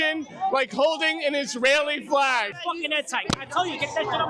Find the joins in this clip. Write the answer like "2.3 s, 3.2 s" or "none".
2.6 s